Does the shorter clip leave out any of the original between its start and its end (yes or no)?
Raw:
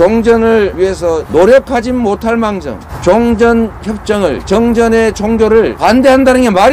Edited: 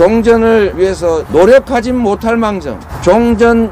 no